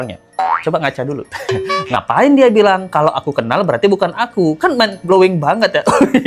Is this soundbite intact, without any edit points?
no; 1 cut; at 2.0 s

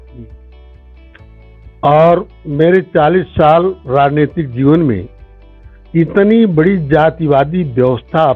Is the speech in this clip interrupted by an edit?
no; 0 cuts

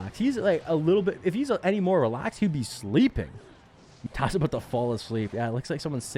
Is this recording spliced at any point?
yes; 1 cut; at 4.0 s

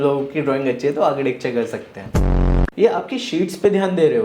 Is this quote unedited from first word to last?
no; 1 cut; at 2.2 s

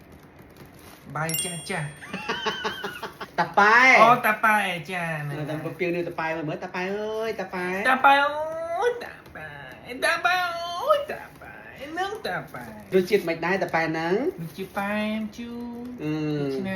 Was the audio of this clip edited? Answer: yes; 2 cuts; at 3.2 s, 12.9 s

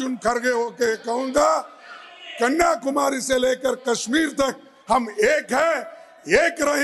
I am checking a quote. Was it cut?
no; 0 cuts

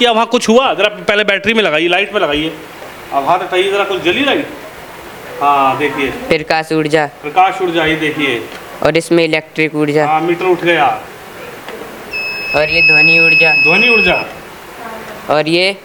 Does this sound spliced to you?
no; 0 cuts

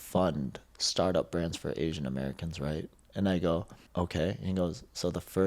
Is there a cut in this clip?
yes; 1 cut; at 3.8 s

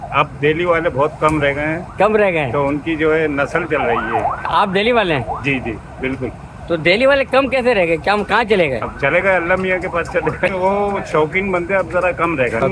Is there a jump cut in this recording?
no; 0 cuts

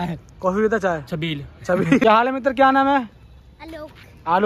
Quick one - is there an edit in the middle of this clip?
yes; 1 cut; at 2.0 s

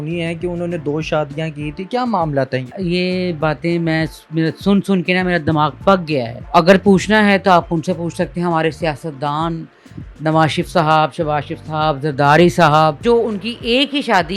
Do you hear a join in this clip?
yes; 3 cuts; at 2.7 s, 6.4 s, 13.0 s

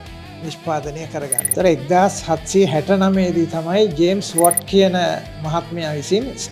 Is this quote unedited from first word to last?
yes; 0 cuts

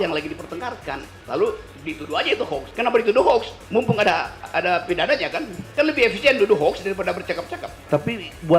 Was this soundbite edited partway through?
yes; 3 cuts; at 2.7 s, 4.4 s, 5.6 s

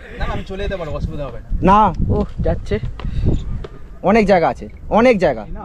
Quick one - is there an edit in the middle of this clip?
no; 0 cuts

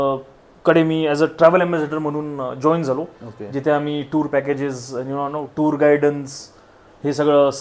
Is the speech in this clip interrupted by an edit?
no; 0 cuts

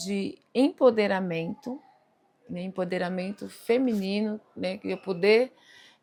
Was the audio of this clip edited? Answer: no; 0 cuts

